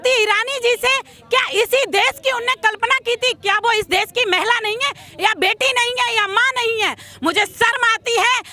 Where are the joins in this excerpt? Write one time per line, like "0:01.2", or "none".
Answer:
none